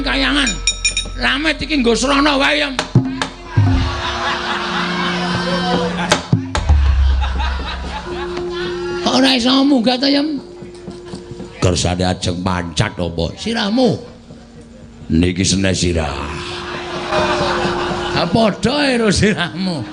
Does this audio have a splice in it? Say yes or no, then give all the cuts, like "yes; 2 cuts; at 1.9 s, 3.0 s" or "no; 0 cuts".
no; 0 cuts